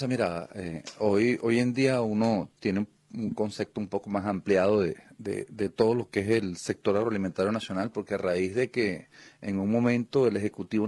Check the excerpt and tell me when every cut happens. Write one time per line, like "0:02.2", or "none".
0:07.9